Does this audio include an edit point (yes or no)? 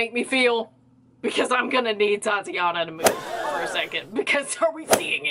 no